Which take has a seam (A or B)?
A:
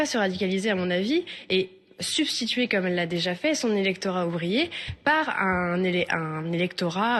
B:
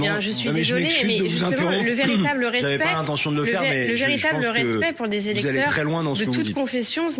B